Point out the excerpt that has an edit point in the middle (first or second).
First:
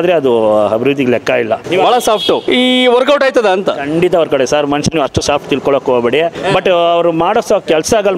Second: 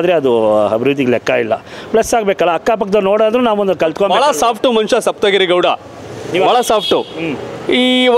first